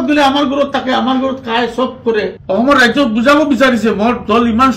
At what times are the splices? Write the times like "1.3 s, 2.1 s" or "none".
2.4 s